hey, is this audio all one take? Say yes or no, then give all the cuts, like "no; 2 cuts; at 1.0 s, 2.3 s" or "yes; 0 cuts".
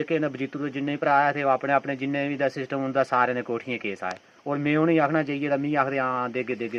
yes; 0 cuts